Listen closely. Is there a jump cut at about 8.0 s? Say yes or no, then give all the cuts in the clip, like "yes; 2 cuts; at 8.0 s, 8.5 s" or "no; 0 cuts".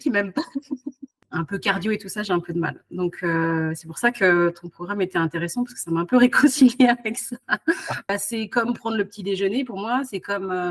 yes; 2 cuts; at 1.1 s, 8.0 s